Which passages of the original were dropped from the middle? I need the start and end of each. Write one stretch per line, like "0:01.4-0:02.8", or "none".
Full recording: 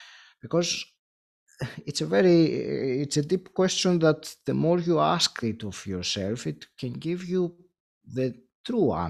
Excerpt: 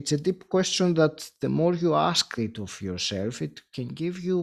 none